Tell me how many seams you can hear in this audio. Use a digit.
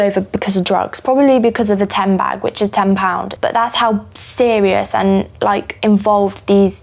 0